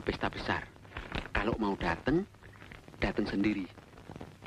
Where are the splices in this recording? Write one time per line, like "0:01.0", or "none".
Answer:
none